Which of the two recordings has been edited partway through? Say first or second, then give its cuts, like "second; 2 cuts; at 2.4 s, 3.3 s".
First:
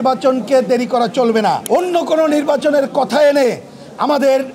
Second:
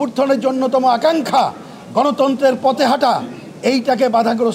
first; 1 cut; at 1.6 s